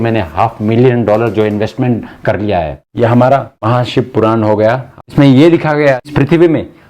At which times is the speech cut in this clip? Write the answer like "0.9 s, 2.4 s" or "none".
2.8 s, 3.5 s, 4.9 s, 6.1 s